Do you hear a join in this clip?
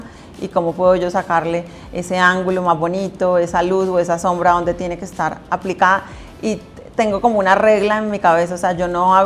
no; 0 cuts

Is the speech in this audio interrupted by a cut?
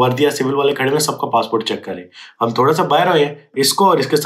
no; 0 cuts

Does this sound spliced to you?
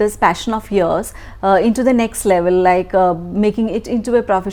no; 0 cuts

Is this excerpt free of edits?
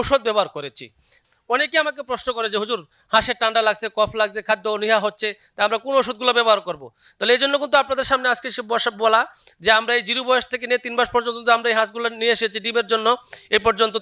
no; 1 cut; at 1.1 s

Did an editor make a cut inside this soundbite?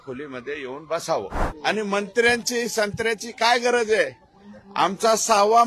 yes; 1 cut; at 1.4 s

